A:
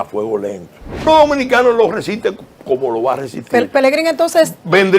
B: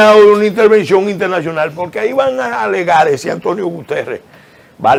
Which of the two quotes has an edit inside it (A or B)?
A